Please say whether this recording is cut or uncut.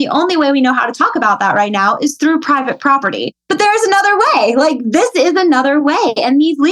cut